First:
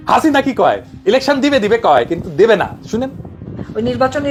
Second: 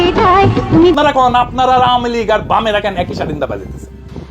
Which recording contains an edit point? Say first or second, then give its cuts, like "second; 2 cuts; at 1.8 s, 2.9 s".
second; 1 cut; at 0.9 s